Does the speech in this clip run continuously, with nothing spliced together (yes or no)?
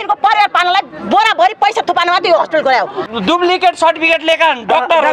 no